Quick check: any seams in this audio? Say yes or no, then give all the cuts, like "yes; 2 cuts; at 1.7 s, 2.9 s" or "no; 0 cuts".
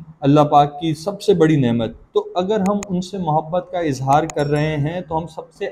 no; 0 cuts